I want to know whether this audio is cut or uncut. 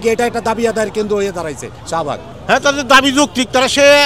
cut